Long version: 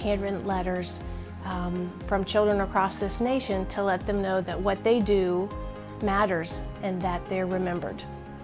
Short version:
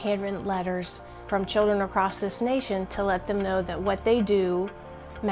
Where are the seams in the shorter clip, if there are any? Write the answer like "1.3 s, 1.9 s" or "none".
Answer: 1.2 s